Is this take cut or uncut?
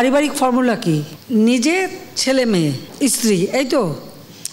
cut